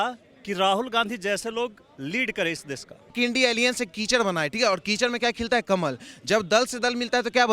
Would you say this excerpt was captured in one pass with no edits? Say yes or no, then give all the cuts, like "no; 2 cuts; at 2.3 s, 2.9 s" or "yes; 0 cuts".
no; 1 cut; at 3.1 s